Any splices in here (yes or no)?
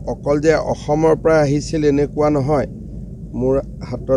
no